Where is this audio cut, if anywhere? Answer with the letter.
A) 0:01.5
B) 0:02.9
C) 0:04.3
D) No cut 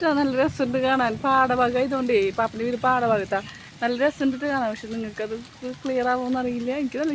D